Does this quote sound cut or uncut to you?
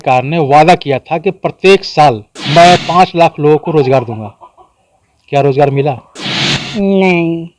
cut